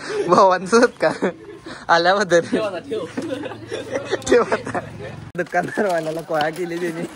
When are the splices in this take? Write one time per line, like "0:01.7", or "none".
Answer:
0:05.1